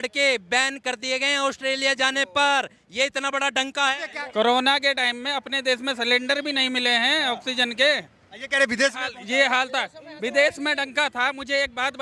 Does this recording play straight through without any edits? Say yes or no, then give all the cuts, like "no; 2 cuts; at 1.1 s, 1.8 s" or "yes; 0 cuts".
no; 1 cut; at 4.1 s